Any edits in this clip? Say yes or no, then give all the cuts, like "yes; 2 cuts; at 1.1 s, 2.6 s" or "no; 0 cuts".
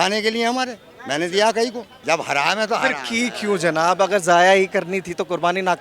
yes; 1 cut; at 1.9 s